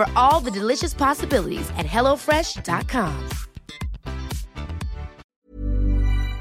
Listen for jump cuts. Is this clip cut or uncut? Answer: cut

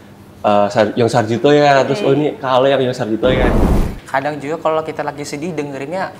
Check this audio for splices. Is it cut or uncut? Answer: cut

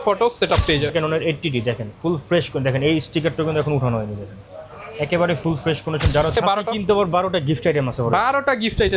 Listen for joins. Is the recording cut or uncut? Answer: cut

